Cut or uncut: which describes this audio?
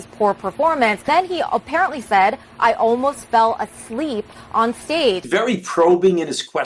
cut